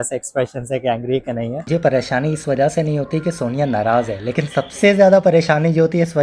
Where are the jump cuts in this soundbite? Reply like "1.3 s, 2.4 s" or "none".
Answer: 1.6 s